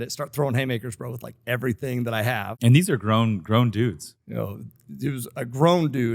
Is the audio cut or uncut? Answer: cut